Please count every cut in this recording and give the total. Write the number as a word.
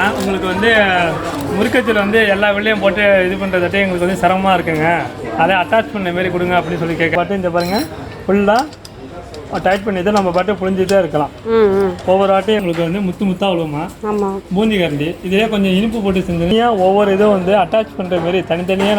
three